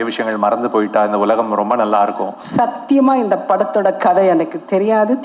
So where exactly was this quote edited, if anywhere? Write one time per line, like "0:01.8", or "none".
0:02.3